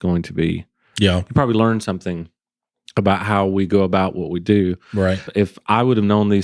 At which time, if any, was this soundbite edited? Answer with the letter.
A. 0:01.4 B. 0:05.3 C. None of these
B